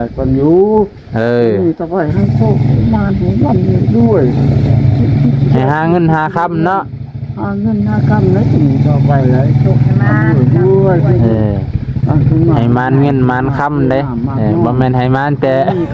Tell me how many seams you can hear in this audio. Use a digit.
0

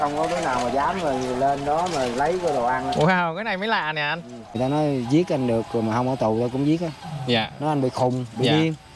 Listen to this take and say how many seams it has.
1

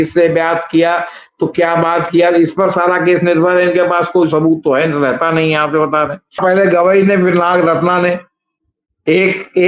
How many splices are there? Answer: 1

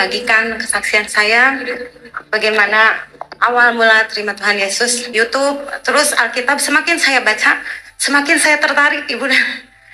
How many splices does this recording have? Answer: 1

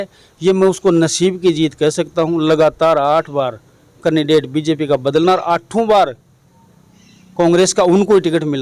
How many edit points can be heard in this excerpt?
0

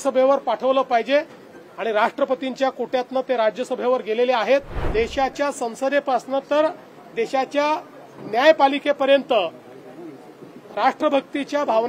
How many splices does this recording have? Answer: 1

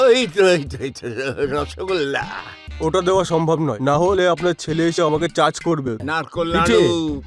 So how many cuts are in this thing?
1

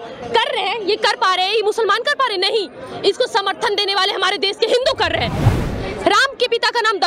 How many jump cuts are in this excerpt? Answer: 1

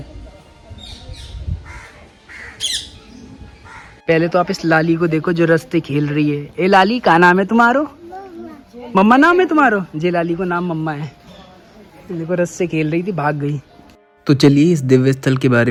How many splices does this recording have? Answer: 0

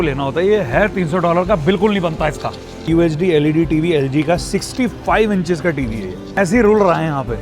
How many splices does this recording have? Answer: 2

